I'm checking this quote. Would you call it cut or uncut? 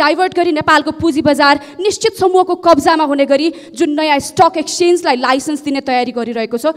uncut